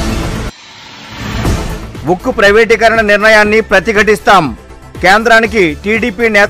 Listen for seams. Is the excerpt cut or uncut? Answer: cut